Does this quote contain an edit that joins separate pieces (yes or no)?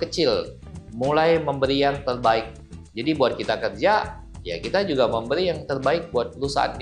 no